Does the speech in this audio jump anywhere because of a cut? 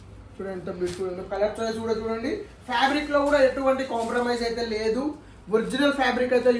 no; 0 cuts

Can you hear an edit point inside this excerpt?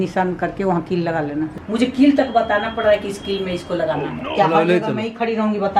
yes; 2 cuts; at 1.6 s, 4.2 s

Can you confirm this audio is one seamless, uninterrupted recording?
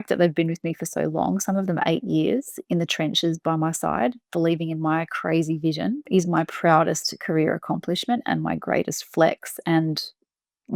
yes; 0 cuts

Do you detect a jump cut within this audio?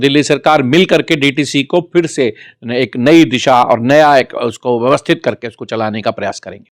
no; 0 cuts

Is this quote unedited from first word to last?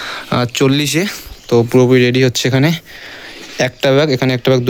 yes; 0 cuts

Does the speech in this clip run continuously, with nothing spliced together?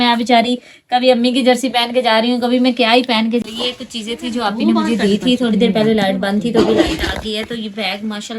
no; 1 cut; at 3.4 s

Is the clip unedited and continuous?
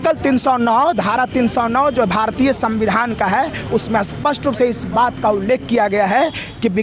yes; 0 cuts

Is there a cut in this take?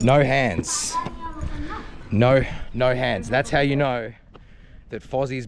no; 0 cuts

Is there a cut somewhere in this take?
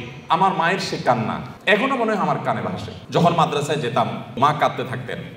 yes; 3 cuts; at 1.5 s, 2.9 s, 4.4 s

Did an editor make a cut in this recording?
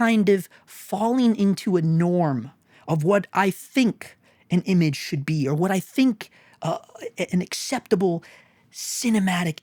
no; 0 cuts

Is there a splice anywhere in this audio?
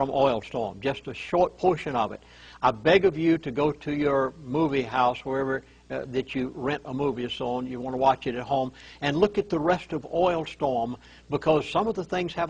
no; 0 cuts

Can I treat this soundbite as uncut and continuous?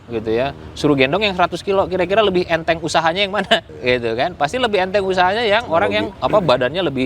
no; 2 cuts; at 3.7 s, 6.1 s

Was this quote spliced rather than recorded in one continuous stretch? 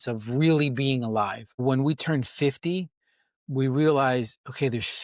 yes; 1 cut; at 1.5 s

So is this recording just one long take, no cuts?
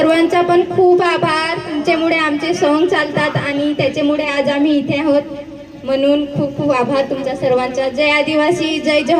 yes; 0 cuts

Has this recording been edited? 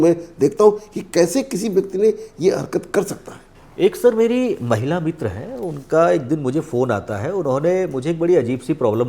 no; 0 cuts

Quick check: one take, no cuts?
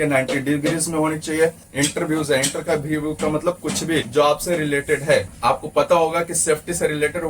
no; 3 cuts; at 1.6 s, 4.1 s, 5.3 s

